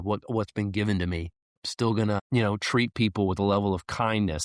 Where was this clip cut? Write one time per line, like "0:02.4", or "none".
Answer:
0:02.2